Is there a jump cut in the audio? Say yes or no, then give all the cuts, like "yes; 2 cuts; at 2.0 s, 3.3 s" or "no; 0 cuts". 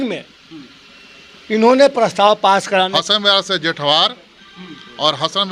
yes; 1 cut; at 3.0 s